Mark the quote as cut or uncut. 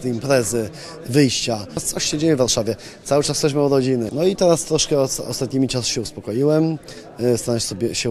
cut